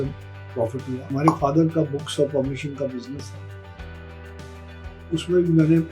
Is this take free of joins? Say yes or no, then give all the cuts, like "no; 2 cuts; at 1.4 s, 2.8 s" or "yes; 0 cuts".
no; 1 cut; at 1.0 s